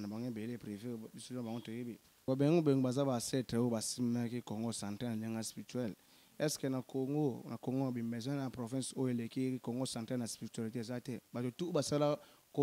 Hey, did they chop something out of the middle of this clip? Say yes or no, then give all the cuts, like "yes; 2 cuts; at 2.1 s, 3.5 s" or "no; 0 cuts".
yes; 1 cut; at 2.3 s